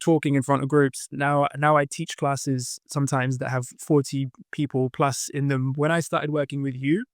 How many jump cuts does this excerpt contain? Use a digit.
1